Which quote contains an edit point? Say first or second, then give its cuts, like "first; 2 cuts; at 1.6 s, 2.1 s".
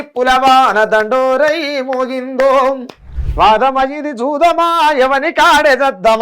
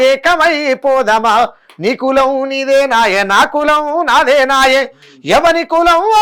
first; 1 cut; at 3.2 s